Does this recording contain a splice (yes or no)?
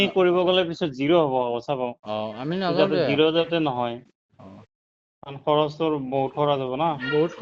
no